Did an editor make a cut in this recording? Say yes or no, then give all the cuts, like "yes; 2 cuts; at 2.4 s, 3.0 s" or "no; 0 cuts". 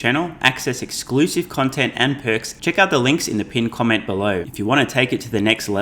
yes; 2 cuts; at 2.5 s, 4.5 s